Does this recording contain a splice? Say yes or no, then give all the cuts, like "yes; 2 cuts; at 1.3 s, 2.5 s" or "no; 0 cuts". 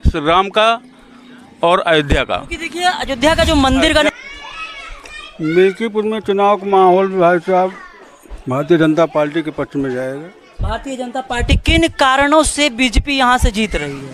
yes; 1 cut; at 4.1 s